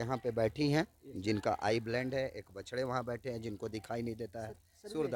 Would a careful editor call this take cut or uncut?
uncut